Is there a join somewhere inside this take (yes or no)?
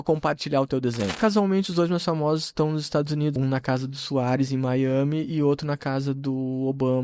yes